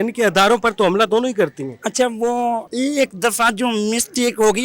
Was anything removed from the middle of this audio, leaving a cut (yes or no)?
yes